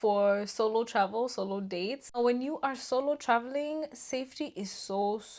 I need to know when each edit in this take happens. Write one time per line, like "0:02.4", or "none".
0:02.2